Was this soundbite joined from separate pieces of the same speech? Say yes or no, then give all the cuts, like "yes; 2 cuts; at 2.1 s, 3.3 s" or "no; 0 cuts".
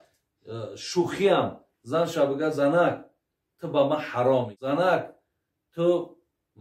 yes; 1 cut; at 4.6 s